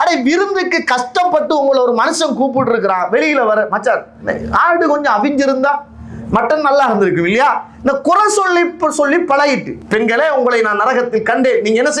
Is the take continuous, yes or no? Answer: no